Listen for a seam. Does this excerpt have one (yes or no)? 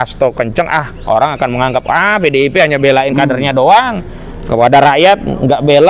no